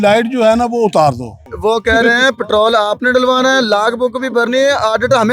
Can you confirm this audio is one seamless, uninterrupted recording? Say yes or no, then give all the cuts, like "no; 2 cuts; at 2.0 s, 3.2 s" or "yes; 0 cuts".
no; 1 cut; at 1.4 s